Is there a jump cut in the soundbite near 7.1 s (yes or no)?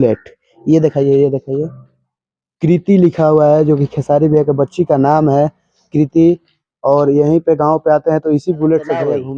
no